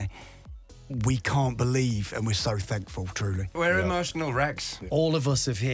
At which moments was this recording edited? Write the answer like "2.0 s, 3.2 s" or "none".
3.5 s, 4.8 s